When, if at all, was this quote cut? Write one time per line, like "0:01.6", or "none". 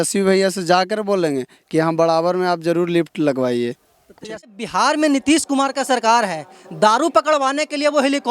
0:04.4